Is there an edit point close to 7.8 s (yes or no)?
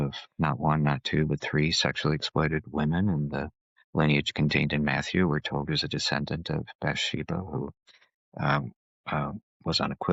no